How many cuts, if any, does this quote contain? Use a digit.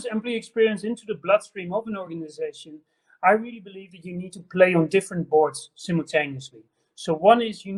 0